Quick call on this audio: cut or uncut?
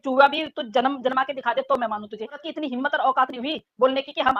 cut